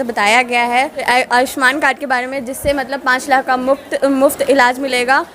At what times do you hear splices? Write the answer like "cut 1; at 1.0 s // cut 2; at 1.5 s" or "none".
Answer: cut 1; at 1.0 s